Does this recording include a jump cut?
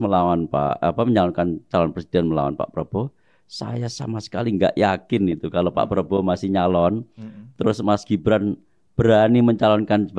no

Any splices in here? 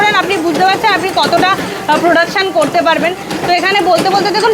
no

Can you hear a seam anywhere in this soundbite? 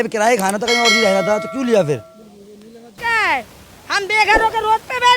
yes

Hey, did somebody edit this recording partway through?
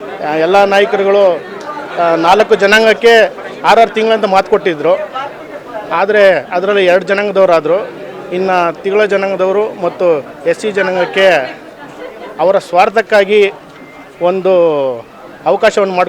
no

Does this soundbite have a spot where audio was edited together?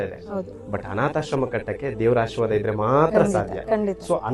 no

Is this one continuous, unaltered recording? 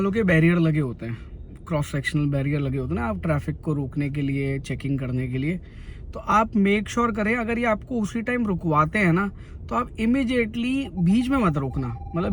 yes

